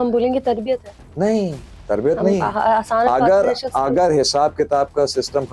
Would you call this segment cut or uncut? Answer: uncut